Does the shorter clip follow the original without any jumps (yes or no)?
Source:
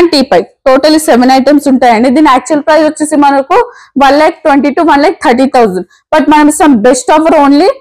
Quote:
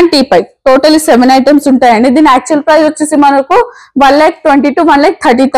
yes